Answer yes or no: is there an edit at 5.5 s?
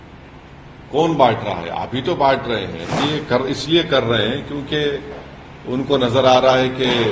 no